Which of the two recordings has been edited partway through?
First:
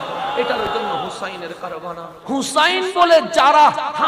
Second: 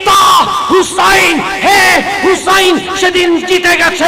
first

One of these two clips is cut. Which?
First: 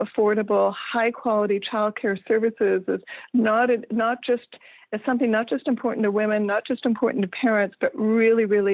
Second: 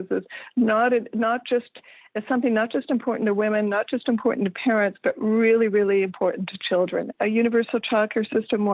second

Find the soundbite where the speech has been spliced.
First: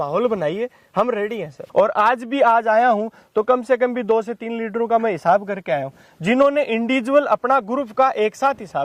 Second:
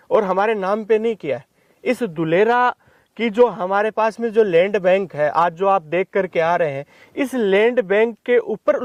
first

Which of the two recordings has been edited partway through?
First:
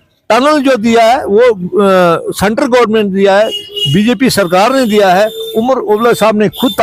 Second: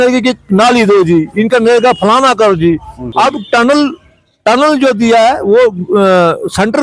second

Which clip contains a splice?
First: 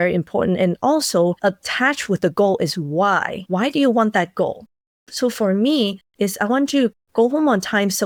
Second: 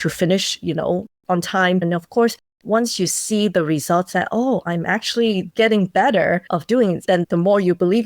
second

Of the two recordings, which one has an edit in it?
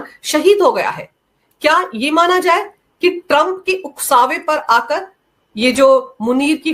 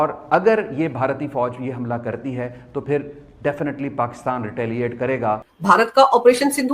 second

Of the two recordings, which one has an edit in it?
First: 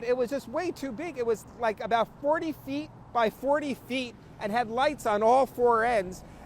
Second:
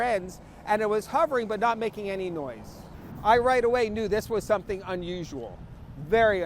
second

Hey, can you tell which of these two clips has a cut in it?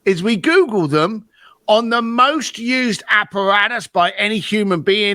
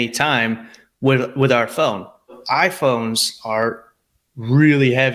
second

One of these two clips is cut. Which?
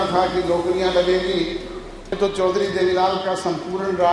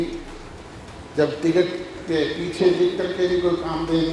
first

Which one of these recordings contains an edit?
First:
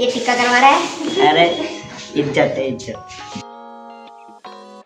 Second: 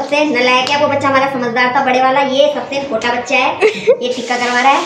first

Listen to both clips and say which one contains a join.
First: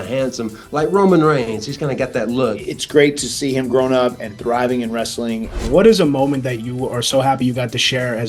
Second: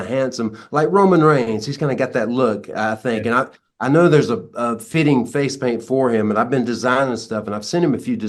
first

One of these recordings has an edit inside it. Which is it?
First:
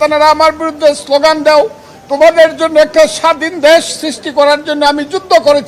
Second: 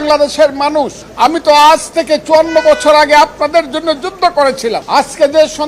second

